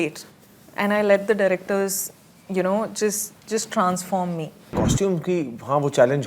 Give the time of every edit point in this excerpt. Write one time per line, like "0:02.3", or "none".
0:04.7